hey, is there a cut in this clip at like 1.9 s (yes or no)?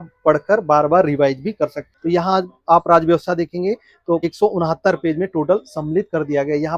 yes